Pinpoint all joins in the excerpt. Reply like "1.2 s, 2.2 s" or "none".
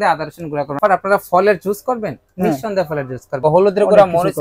0.8 s, 3.4 s